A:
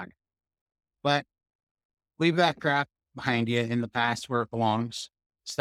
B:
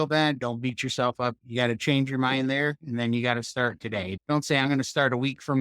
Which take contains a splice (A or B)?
B